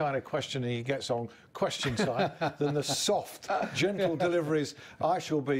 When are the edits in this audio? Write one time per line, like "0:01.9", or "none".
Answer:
none